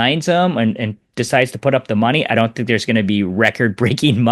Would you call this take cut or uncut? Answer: uncut